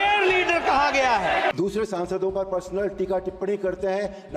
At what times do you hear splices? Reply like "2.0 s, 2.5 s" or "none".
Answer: 1.5 s